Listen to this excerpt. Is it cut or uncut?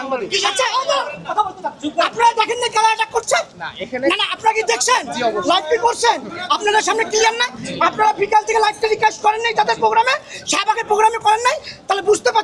uncut